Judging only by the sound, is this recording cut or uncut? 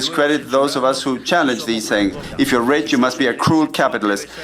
cut